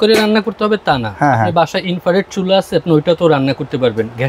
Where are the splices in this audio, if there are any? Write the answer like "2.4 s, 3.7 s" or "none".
none